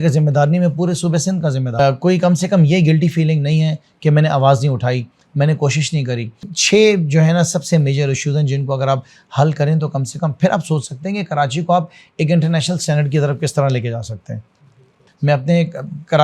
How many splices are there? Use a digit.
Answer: 3